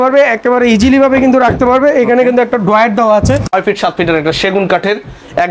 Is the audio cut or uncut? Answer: cut